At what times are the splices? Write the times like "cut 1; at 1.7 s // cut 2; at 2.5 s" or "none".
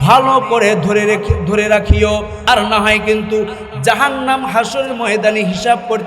cut 1; at 2.3 s